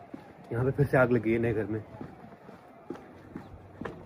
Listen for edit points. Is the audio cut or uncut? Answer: uncut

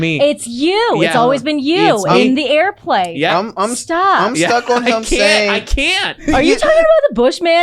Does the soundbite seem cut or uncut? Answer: cut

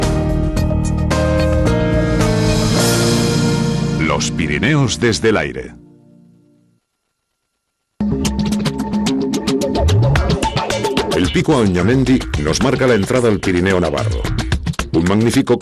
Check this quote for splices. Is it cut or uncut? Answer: uncut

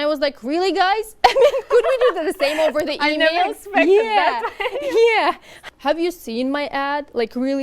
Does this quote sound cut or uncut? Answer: cut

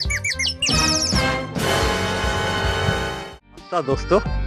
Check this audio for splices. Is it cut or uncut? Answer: cut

